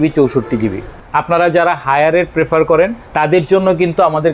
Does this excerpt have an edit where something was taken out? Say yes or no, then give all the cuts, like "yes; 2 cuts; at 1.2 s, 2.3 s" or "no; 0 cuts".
yes; 2 cuts; at 1.0 s, 3.0 s